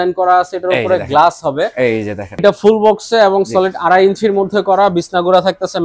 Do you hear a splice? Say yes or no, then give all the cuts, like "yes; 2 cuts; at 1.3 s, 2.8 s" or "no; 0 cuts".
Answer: yes; 1 cut; at 2.3 s